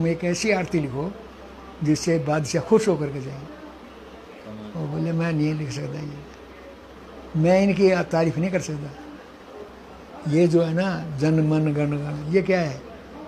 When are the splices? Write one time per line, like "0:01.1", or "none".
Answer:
0:09.7